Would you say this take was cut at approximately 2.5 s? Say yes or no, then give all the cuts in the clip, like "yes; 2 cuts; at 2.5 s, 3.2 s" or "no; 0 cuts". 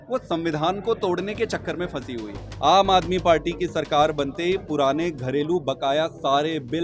yes; 1 cut; at 2.5 s